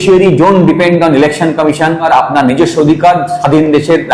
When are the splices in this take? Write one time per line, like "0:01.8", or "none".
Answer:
0:02.1